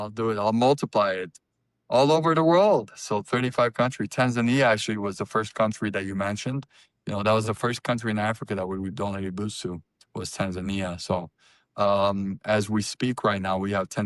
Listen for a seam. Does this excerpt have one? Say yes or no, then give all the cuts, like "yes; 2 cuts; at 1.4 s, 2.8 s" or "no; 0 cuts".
no; 0 cuts